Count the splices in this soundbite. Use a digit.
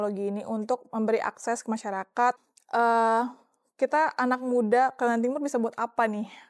1